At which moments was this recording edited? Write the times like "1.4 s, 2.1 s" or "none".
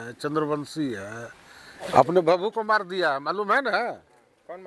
1.7 s